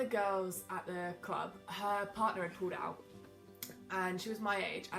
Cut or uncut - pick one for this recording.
uncut